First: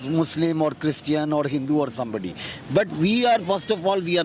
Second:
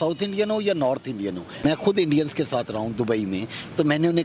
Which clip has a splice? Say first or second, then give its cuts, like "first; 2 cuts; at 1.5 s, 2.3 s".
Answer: second; 1 cut; at 1.8 s